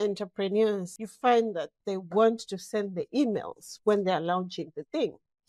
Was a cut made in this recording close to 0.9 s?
yes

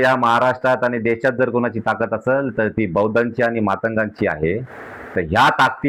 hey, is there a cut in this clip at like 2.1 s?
no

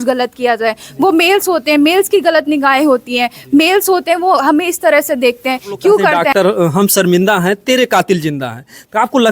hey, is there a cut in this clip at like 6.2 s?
yes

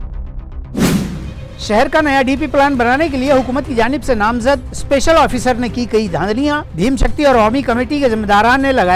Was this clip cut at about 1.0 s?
no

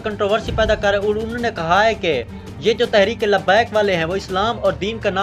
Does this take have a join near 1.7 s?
no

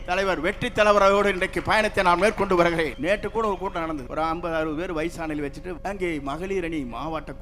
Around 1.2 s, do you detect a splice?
no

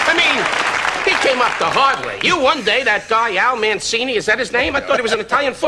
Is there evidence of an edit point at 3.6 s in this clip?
yes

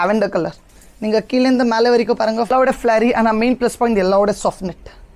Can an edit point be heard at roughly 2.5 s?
yes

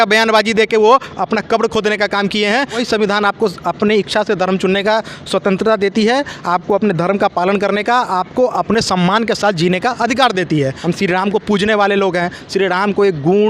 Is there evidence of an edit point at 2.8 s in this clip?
yes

